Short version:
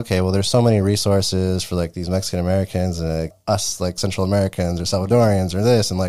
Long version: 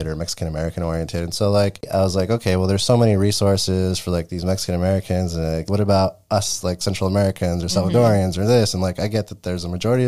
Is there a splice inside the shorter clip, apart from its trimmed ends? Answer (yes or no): yes